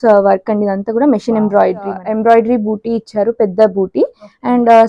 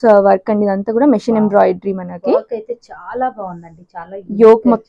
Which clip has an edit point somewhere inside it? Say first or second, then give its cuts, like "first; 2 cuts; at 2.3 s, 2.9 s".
first; 1 cut; at 2.0 s